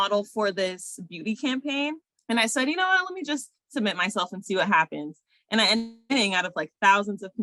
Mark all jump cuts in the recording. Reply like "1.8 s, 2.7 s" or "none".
2.1 s